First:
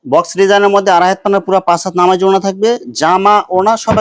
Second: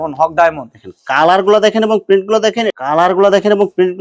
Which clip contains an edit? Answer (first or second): second